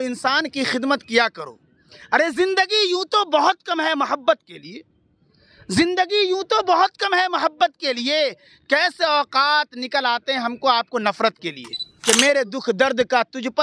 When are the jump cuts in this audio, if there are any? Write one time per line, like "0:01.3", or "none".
0:11.8

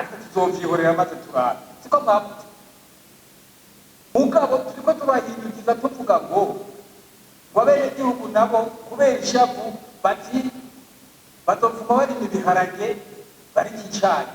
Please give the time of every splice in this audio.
0:04.1

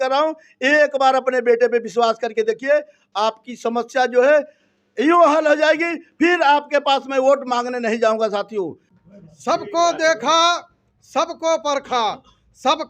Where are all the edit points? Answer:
0:08.8

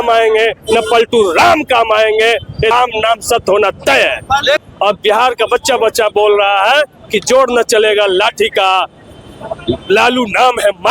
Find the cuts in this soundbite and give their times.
0:02.7
0:04.6

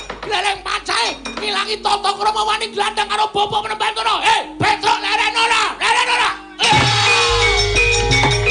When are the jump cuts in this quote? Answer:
none

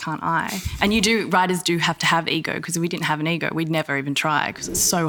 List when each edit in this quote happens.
none

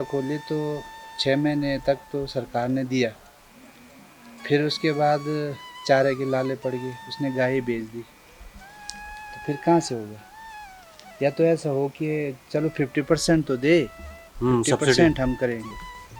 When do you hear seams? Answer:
none

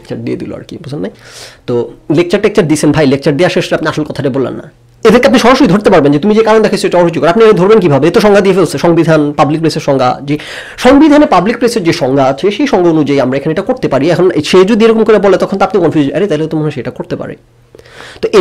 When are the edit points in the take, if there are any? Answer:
0:04.7

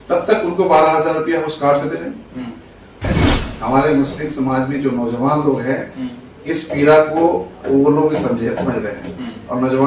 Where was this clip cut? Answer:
0:03.1

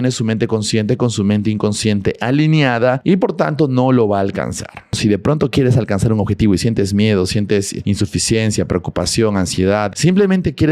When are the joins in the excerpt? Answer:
0:03.0
0:05.0
0:07.7
0:09.9

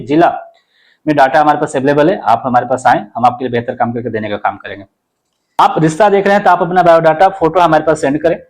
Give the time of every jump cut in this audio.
0:05.6

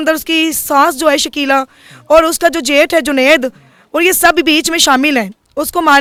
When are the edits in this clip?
none

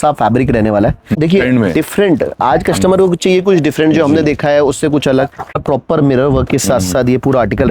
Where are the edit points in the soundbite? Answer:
0:01.1
0:05.6

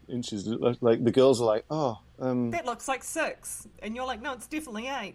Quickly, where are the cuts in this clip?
none

